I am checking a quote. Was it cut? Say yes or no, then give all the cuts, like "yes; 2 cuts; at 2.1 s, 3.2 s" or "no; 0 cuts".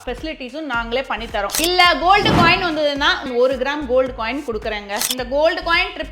yes; 3 cuts; at 1.6 s, 3.2 s, 5.1 s